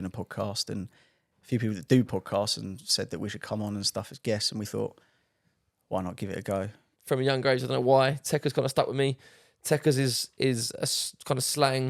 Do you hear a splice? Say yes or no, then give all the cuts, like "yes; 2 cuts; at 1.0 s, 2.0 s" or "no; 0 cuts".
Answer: yes; 1 cut; at 6.9 s